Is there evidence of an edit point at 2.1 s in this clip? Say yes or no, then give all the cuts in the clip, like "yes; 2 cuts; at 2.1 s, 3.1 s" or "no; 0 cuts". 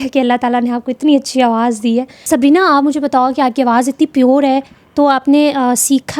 yes; 1 cut; at 2.1 s